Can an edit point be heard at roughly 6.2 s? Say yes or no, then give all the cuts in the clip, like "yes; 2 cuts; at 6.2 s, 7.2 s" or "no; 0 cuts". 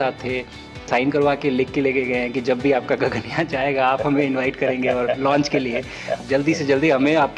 yes; 2 cuts; at 0.9 s, 6.2 s